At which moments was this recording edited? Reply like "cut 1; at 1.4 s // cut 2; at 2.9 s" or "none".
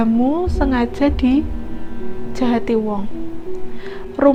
none